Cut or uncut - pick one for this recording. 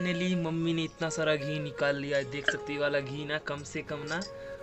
uncut